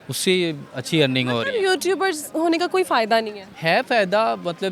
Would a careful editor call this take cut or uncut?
uncut